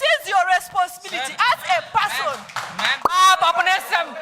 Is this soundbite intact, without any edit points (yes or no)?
no